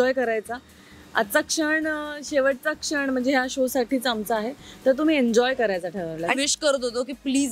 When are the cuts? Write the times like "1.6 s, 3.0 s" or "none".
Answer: 6.3 s

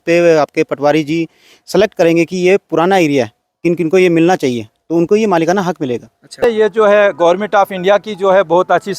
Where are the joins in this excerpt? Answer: 6.3 s

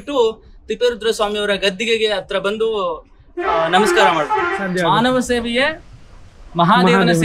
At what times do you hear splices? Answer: 4.6 s

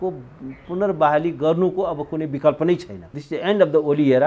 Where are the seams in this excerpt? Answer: 3.1 s

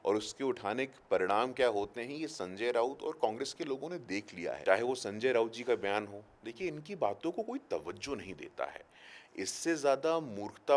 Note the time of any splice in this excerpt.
4.4 s

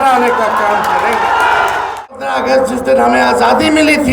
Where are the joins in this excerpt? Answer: 2.0 s

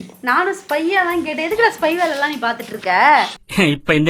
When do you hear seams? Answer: none

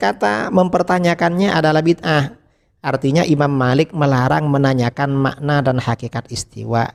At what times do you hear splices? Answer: none

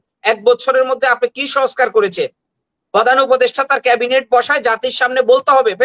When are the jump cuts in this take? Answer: none

